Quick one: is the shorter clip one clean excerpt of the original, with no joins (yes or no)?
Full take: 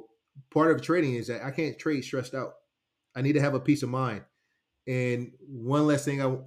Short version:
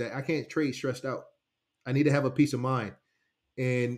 yes